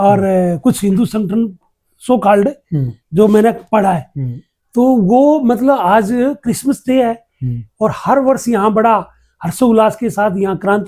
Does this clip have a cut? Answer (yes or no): no